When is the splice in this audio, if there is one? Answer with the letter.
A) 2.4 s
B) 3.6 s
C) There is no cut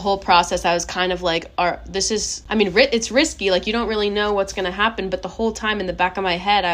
A